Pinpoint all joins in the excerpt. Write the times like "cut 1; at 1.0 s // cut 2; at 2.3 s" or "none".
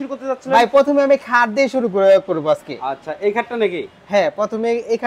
none

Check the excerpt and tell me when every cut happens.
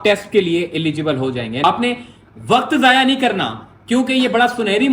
cut 1; at 1.6 s

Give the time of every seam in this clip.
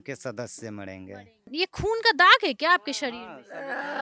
cut 1; at 1.5 s

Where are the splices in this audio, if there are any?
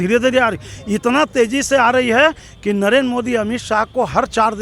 none

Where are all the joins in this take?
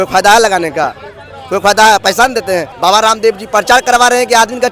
cut 1; at 2.7 s

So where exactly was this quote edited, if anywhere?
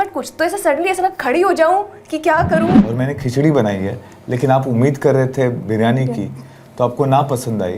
cut 1; at 2.9 s

